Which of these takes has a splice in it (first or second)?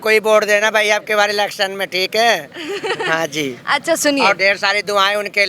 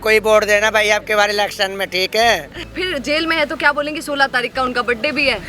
second